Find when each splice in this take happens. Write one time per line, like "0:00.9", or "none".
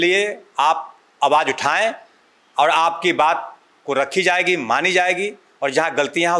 none